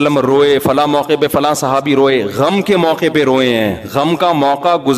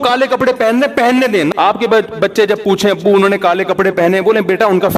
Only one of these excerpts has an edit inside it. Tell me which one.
second; 1 cut; at 1.5 s

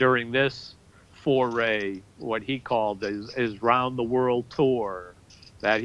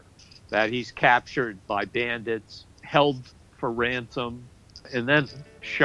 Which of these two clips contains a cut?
second; 3 cuts; at 1.7 s, 2.8 s, 4.9 s

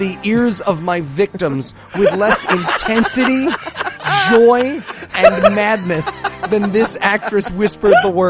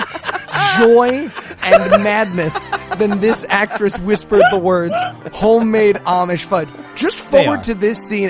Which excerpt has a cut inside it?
second; 1 cut; at 6.8 s

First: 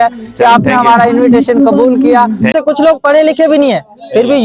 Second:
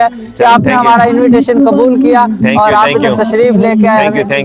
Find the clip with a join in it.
first; 1 cut; at 2.5 s

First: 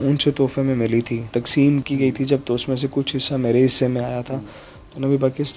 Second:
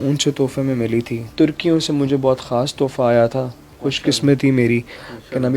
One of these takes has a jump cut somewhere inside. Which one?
second; 1 cut; at 1.3 s

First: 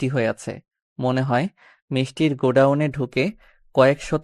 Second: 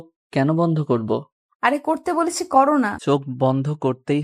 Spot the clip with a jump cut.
second; 1 cut; at 3.0 s

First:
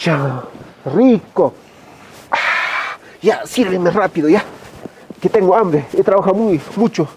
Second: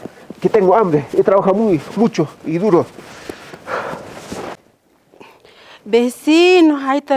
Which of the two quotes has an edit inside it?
second; 1 cut; at 4.7 s

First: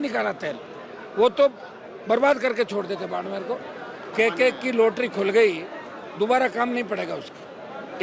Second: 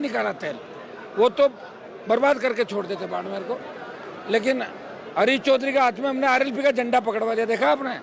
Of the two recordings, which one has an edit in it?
first; 1 cut; at 4.1 s

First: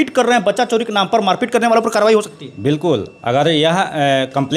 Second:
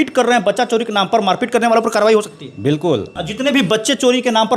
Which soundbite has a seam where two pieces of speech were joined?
second; 1 cut; at 3.1 s

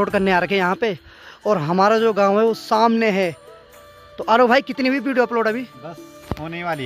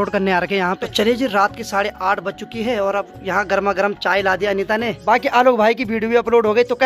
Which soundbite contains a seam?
second; 2 cuts; at 0.8 s, 5.0 s

